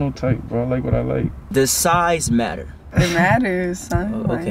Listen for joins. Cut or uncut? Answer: cut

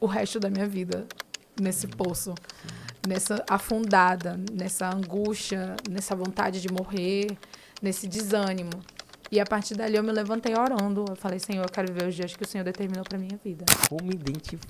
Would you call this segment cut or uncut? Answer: cut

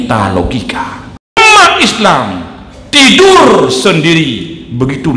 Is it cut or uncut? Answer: cut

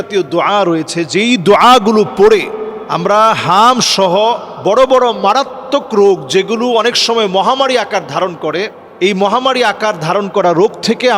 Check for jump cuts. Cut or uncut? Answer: uncut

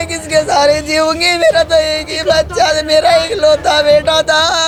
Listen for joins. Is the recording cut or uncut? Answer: uncut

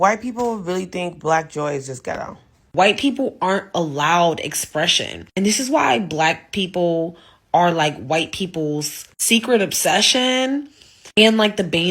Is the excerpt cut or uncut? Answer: cut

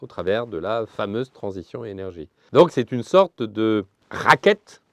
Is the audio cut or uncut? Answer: cut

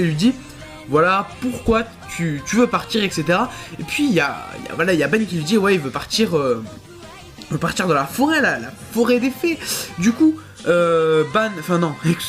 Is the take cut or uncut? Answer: uncut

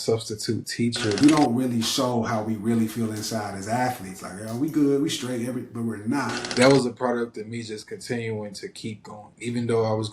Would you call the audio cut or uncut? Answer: cut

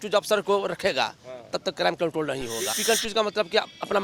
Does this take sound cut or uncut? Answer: cut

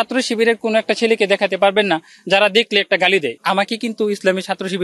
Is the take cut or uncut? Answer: cut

